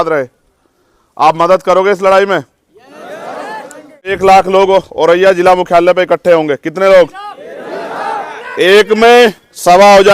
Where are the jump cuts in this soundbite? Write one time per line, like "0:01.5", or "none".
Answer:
0:04.2